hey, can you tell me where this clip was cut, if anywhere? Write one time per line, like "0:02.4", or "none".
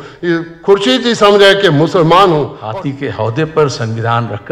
0:02.6